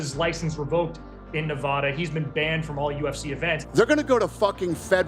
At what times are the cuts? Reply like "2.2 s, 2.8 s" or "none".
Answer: 3.6 s